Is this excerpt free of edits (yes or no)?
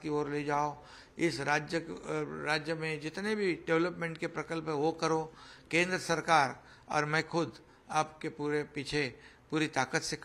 yes